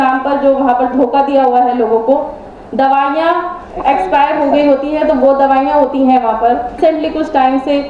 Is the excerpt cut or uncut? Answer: cut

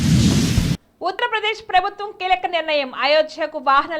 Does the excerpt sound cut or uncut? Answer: cut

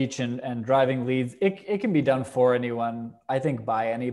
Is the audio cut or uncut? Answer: uncut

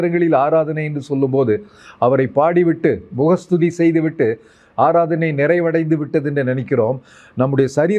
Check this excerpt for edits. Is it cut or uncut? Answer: uncut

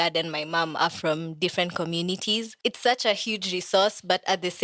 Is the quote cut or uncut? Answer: uncut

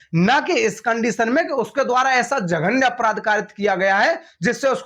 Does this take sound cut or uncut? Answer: uncut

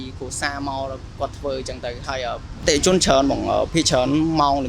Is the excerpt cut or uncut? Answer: cut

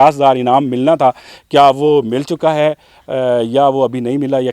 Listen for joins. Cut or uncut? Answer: uncut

